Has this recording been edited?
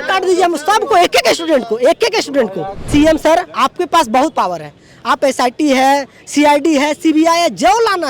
yes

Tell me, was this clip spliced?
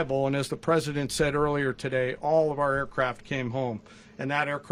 no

